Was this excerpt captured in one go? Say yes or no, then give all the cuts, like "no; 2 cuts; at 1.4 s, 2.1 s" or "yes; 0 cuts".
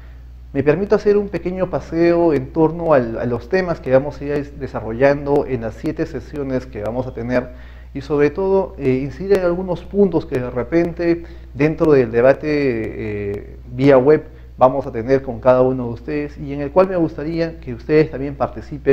yes; 0 cuts